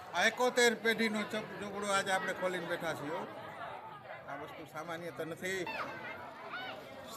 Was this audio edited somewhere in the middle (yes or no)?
yes